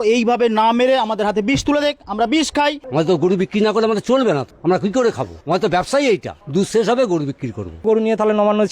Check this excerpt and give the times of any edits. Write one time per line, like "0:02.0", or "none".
0:02.8
0:04.5
0:05.3
0:06.4
0:07.8